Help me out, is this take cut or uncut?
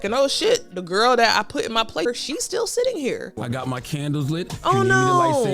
cut